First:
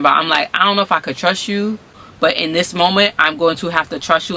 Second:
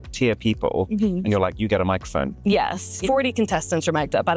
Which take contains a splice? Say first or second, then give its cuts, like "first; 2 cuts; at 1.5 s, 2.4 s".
first; 1 cut; at 2.0 s